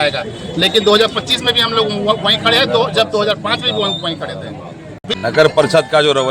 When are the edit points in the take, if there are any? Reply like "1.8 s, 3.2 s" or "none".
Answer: 5.0 s